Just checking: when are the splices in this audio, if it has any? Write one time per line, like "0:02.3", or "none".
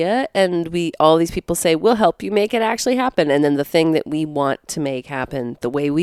none